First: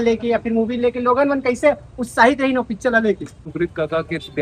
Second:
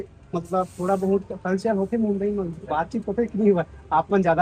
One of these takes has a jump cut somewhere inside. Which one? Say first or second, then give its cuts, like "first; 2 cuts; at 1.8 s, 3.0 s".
first; 1 cut; at 3.5 s